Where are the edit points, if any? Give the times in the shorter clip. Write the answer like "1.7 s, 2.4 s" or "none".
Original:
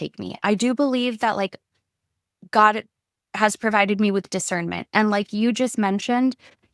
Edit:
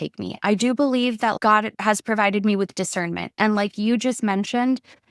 1.4 s